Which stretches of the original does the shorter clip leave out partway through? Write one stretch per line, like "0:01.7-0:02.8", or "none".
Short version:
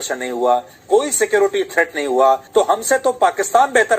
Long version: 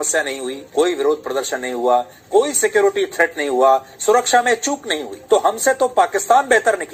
0:03.9-0:05.2